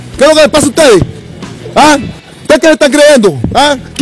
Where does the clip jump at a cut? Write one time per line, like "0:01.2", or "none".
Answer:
none